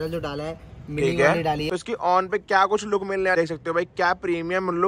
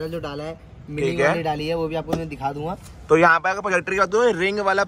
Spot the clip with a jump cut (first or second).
first